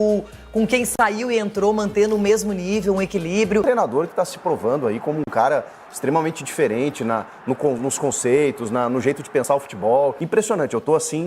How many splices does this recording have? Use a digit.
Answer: 2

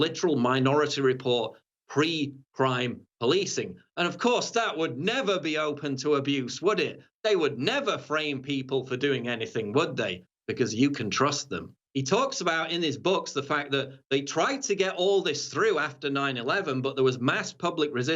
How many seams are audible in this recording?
1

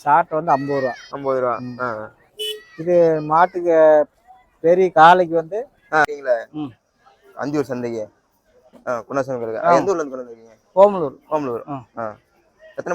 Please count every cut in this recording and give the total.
1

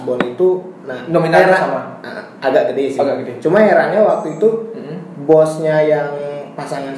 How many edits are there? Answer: 0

